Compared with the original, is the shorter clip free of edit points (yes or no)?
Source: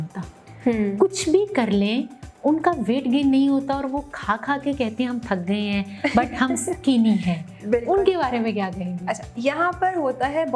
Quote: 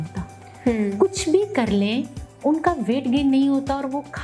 yes